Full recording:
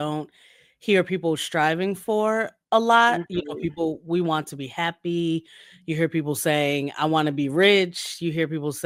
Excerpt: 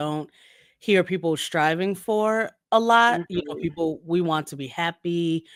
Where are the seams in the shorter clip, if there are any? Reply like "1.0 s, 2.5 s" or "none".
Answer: none